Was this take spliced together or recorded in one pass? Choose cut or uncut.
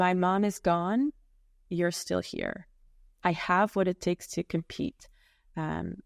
uncut